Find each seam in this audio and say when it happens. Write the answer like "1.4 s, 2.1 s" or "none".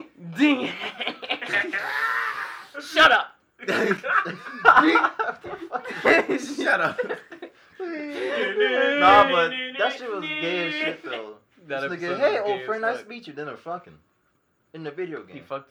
none